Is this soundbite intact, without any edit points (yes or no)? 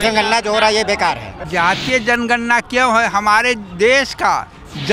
no